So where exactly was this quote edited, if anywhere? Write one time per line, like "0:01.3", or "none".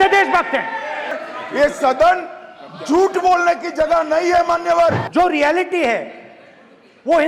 0:01.2
0:05.0

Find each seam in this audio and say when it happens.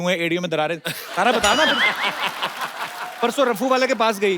0:03.2

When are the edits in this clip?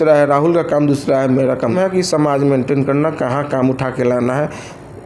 0:01.7

